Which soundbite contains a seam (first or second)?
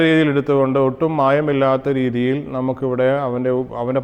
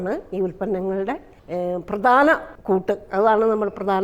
second